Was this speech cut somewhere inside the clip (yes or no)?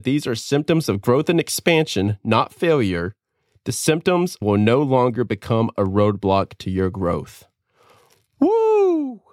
yes